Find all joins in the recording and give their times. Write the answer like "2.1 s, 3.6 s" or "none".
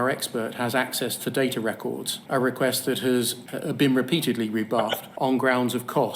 3.5 s, 5.0 s